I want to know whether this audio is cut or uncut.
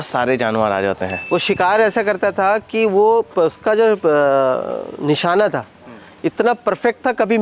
cut